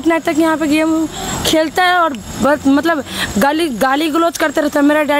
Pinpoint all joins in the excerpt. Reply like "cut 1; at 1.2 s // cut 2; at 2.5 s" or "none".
none